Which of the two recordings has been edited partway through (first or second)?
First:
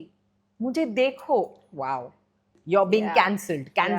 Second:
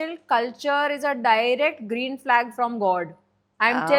first